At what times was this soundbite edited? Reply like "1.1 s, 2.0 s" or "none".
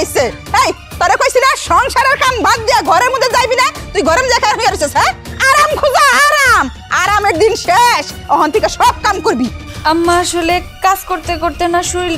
none